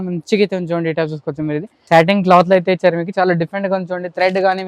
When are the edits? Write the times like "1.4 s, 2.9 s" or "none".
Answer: 1.7 s

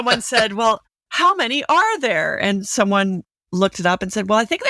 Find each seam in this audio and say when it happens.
1.0 s

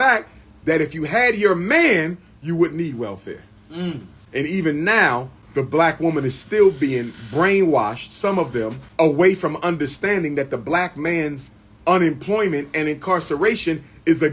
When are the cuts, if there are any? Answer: 4.1 s, 5.4 s, 8.8 s

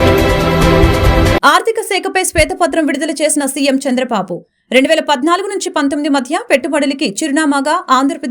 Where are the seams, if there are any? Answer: 1.3 s

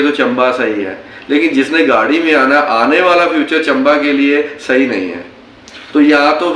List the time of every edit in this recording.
none

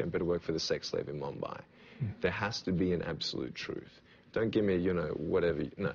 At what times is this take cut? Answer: 2.1 s

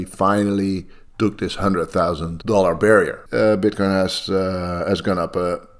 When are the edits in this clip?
2.3 s, 3.2 s

